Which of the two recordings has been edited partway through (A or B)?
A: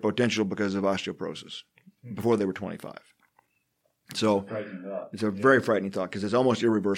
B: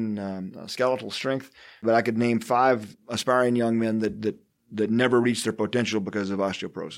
B